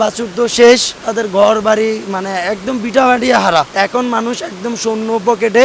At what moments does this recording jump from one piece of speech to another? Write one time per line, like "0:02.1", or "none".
0:01.1
0:03.7